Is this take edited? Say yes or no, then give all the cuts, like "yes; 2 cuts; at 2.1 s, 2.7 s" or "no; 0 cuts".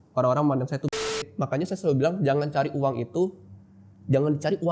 yes; 1 cut; at 1.3 s